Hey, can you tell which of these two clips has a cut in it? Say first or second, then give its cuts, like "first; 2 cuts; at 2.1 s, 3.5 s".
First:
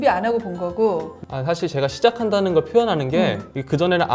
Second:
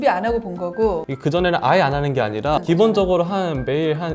second; 2 cuts; at 1.1 s, 2.6 s